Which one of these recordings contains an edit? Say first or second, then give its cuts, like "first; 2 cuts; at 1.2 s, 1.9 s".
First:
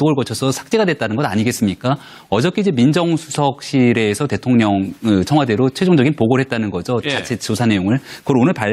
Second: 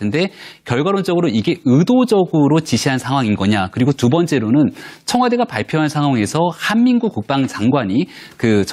first; 1 cut; at 4.9 s